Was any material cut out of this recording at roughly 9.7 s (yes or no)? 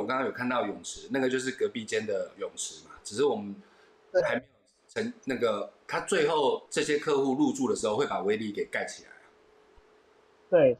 no